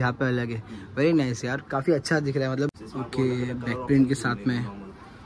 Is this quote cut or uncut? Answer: cut